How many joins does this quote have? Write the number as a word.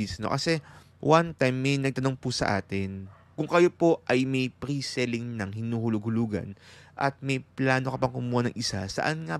zero